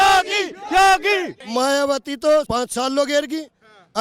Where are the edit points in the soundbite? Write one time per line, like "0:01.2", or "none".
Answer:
0:01.4
0:02.5